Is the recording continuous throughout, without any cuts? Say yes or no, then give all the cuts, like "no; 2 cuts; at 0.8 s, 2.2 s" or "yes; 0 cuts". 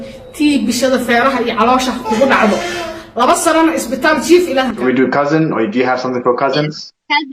no; 1 cut; at 4.8 s